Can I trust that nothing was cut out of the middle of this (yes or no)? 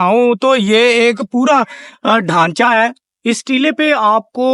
no